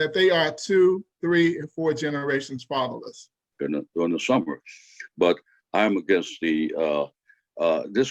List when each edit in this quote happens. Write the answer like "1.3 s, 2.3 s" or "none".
3.5 s